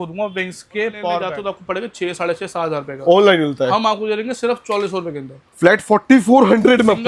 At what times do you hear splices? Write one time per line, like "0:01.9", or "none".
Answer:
0:01.3